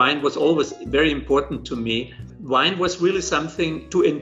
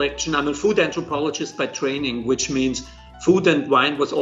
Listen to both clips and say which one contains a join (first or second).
first